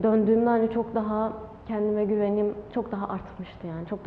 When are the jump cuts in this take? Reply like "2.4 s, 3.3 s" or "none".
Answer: none